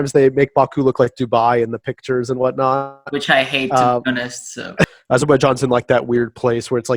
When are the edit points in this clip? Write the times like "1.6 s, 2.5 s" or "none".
4.8 s